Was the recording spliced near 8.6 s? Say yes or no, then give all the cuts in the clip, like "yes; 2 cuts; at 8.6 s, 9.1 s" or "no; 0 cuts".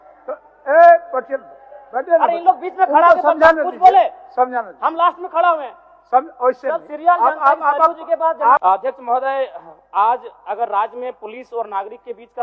yes; 1 cut; at 8.6 s